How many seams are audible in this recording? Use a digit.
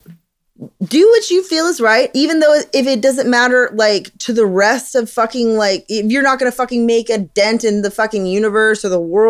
1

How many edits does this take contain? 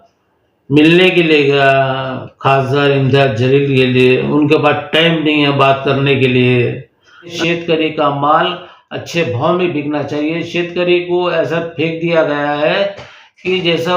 1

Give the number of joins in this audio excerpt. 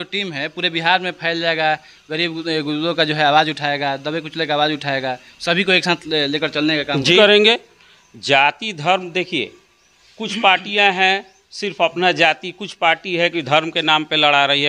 1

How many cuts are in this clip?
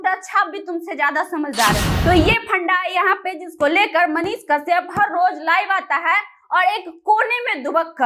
1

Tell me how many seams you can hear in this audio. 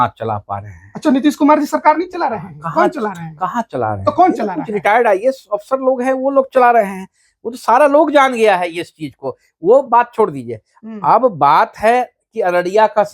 0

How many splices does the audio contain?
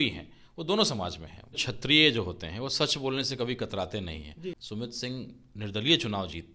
2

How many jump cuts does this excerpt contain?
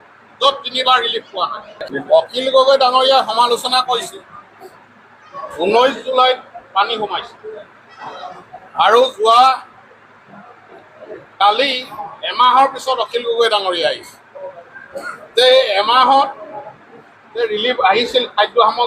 1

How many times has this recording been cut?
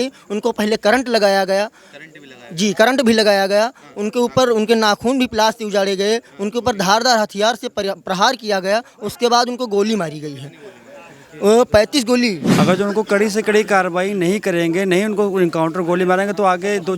1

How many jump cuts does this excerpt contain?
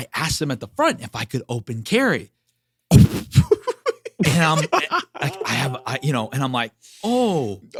0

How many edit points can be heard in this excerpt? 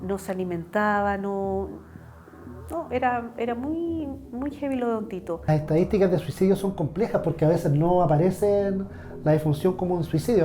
1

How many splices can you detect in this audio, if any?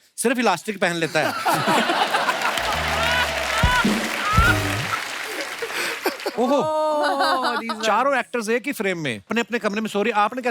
1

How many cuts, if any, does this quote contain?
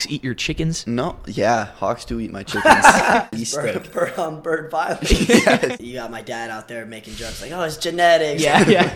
2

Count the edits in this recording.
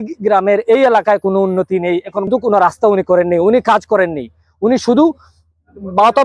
1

